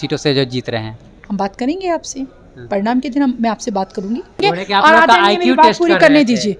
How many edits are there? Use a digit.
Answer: 1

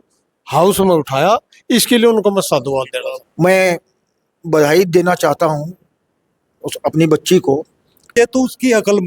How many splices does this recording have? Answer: 2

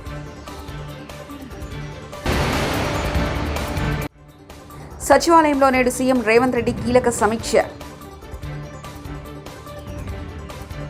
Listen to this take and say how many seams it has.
0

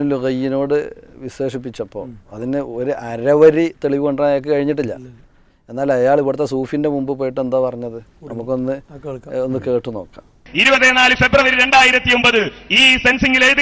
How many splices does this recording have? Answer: 1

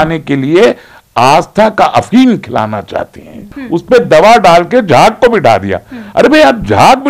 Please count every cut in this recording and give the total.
1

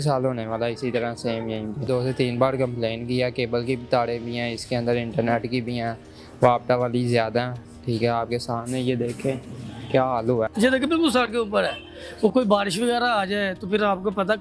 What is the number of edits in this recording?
2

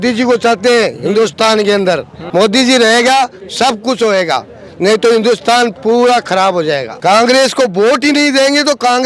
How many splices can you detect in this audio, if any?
2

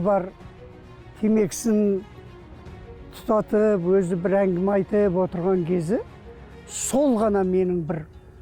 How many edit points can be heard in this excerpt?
0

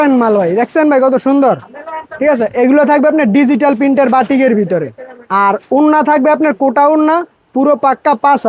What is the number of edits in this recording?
0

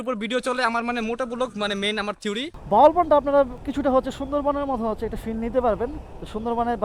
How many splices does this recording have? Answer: 2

